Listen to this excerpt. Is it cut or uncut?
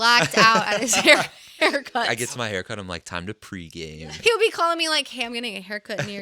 cut